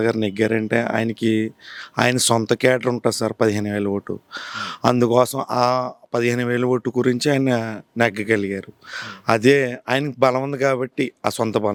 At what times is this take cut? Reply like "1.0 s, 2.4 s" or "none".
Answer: none